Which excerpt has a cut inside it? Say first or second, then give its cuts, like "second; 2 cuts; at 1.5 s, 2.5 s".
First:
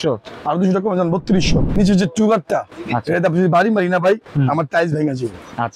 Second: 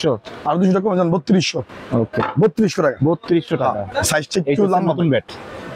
first; 1 cut; at 1.7 s